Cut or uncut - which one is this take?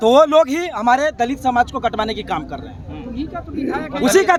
uncut